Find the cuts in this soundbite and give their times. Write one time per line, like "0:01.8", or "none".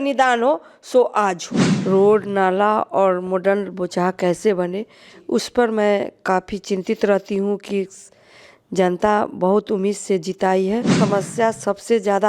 0:01.7
0:11.0